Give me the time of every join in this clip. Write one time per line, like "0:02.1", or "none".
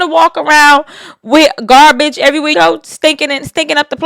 0:02.5